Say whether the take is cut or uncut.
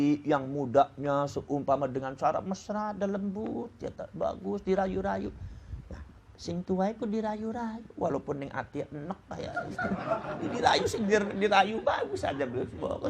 uncut